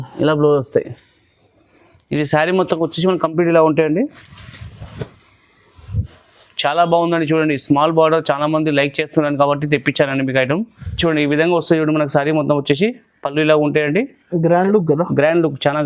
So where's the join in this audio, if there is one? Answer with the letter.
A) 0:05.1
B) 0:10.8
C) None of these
B